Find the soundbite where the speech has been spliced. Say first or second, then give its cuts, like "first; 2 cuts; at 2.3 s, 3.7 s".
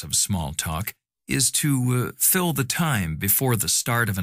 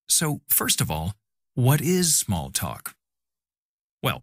first; 1 cut; at 2.7 s